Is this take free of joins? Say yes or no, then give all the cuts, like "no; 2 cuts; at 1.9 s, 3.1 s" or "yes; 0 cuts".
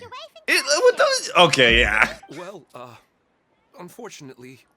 no; 1 cut; at 2.2 s